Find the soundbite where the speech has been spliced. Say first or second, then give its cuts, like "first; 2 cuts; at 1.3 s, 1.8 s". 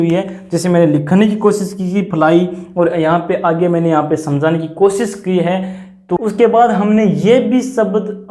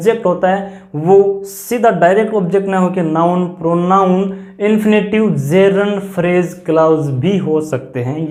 first; 1 cut; at 6.2 s